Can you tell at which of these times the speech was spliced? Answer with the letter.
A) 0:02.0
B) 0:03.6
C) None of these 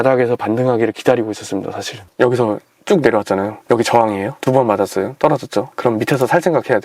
B